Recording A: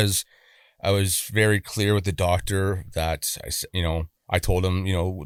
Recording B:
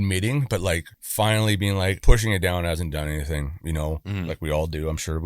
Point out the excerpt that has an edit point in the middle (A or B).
B